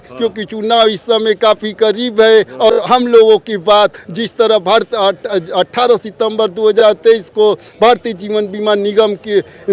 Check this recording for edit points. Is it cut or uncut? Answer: uncut